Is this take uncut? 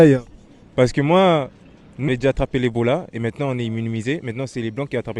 no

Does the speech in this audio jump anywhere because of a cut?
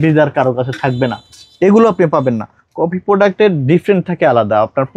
no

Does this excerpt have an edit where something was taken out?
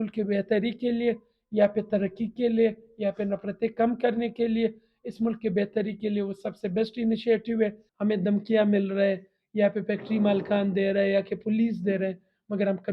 yes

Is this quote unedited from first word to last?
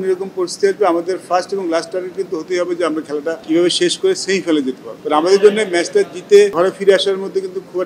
no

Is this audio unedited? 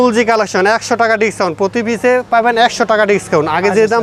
yes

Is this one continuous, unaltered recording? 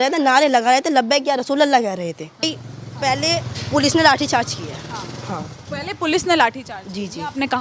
no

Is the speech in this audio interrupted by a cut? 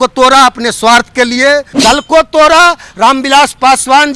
yes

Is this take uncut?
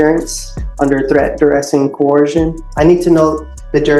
no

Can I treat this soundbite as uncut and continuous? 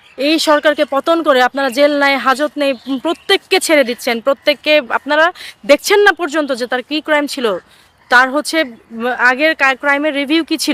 yes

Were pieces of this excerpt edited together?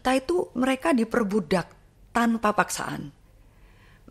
no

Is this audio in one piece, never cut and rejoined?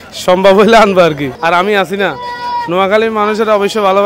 no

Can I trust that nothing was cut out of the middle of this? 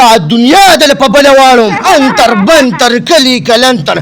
no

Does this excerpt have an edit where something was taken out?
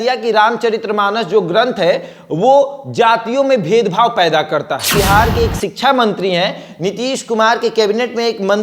yes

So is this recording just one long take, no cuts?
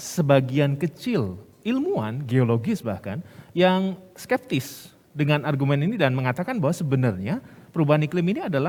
yes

